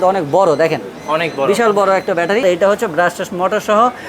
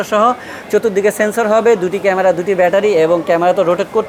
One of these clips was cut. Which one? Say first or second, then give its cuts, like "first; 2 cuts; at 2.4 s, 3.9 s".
first; 1 cut; at 2.4 s